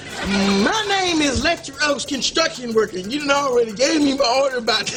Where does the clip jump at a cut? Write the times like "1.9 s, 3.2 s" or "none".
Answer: none